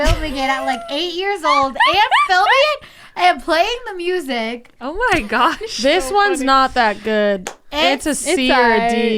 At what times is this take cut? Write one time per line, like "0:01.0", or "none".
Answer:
none